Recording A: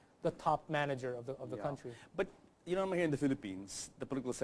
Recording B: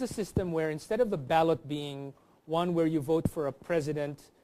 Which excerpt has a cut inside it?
A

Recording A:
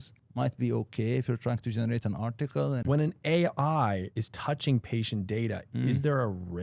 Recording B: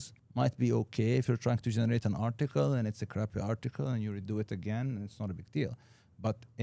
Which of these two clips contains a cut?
A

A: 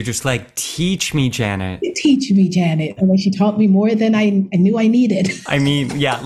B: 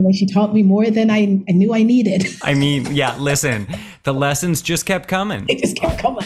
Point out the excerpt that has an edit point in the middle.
A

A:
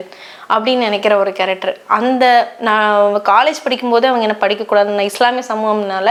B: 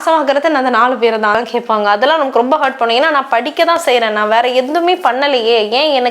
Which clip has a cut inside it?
B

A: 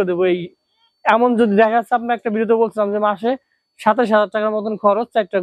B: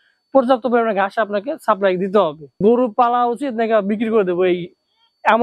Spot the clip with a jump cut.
B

